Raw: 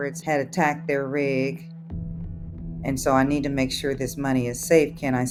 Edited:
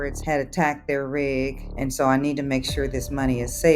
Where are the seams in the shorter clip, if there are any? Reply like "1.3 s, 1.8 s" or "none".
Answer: 1.6 s